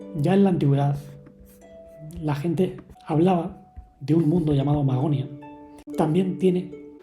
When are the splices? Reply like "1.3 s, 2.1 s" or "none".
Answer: 2.9 s, 5.8 s